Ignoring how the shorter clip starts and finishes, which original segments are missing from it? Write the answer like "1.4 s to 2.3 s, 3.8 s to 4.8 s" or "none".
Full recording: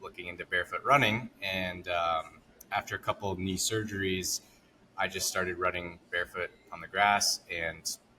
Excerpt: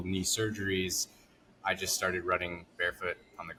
none